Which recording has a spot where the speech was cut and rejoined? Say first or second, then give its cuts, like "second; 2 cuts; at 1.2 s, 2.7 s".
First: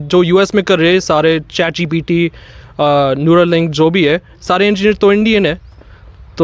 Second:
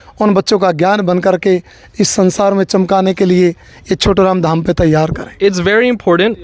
second; 1 cut; at 5.2 s